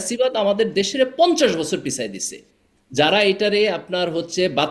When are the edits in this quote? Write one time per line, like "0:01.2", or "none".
none